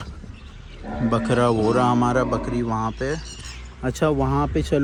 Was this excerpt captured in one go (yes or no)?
yes